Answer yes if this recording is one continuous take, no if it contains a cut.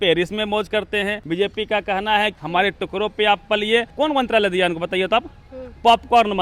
no